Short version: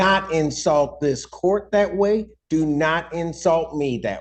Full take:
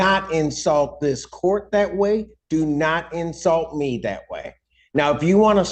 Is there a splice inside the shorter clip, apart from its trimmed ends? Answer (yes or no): no